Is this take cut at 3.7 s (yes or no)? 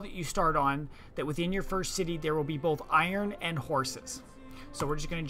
no